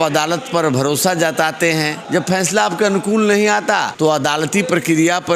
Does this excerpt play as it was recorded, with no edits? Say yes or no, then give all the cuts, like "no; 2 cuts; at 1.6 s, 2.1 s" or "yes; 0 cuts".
no; 2 cuts; at 2.0 s, 3.9 s